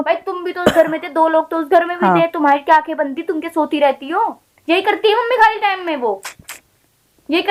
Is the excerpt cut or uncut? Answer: uncut